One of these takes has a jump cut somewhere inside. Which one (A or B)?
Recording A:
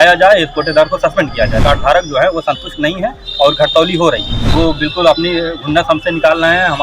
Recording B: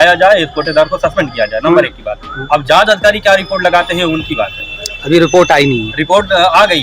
A